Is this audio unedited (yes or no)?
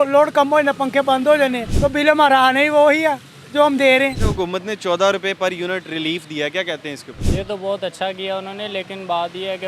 no